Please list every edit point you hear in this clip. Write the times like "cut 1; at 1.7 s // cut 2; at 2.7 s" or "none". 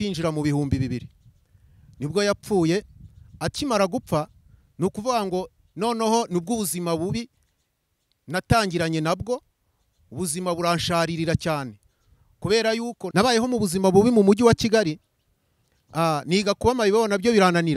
cut 1; at 13.0 s